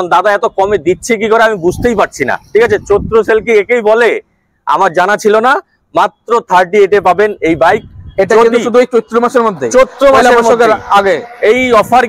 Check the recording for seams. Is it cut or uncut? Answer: uncut